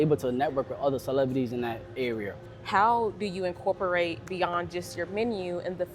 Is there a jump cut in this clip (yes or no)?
yes